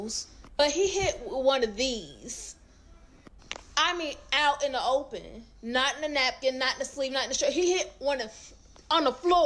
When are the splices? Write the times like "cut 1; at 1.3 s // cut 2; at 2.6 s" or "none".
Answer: none